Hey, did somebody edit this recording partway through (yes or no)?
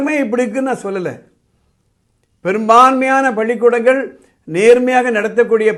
no